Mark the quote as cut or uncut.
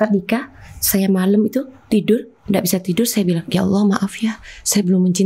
uncut